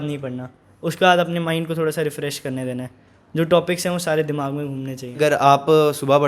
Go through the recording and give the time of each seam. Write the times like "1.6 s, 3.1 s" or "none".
5.2 s